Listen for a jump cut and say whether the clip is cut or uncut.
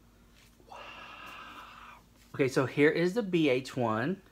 cut